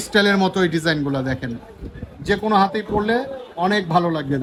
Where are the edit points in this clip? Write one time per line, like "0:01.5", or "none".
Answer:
none

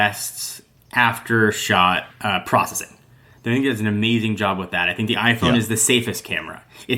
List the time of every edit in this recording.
0:02.1

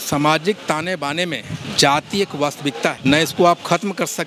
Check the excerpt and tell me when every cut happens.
0:01.6
0:03.0

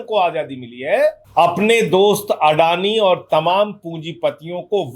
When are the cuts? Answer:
0:01.2

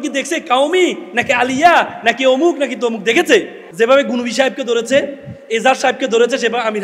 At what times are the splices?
0:03.6

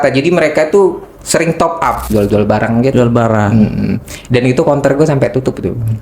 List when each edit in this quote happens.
0:02.1

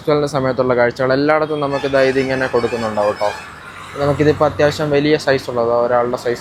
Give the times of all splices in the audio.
none

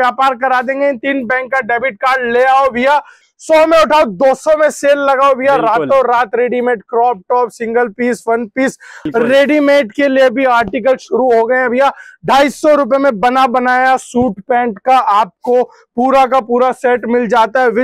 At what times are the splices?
0:03.2
0:09.0

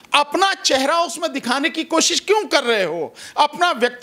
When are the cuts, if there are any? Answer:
none

